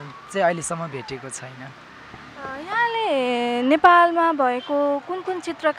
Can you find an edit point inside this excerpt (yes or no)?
no